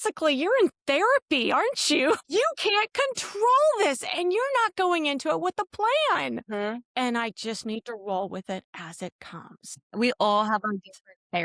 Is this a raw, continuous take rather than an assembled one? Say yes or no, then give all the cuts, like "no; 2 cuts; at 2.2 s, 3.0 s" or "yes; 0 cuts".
no; 3 cuts; at 2.2 s, 6.4 s, 9.8 s